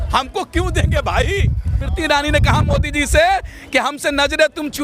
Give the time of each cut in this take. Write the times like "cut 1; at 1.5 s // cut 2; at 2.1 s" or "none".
cut 1; at 1.9 s